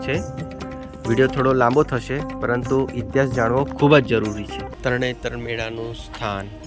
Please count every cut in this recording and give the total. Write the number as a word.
one